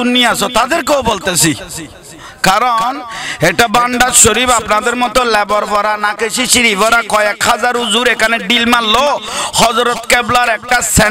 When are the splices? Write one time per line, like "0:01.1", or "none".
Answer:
none